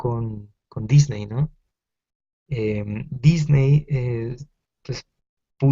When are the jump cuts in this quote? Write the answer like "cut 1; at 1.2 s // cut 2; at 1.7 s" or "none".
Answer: cut 1; at 4.1 s